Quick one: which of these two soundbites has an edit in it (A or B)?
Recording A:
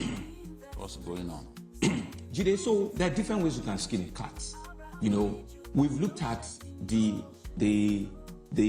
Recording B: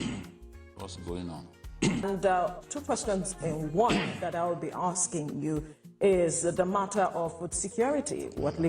B